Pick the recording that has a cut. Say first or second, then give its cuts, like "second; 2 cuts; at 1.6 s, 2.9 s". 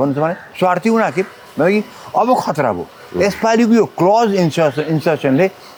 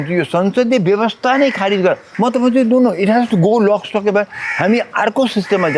second; 1 cut; at 2.1 s